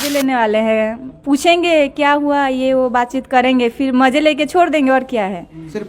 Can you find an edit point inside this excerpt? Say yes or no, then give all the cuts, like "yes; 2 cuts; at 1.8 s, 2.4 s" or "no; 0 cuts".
no; 0 cuts